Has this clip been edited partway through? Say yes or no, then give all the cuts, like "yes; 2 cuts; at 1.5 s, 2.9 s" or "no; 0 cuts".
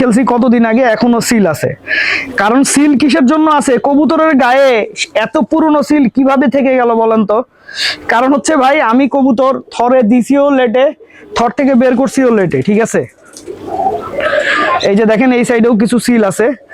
no; 0 cuts